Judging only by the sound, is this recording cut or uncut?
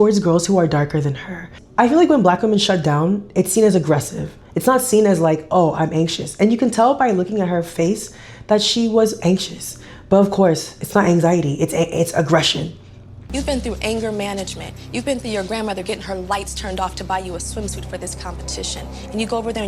cut